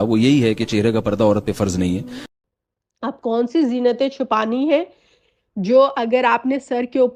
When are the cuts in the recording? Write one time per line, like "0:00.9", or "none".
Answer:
none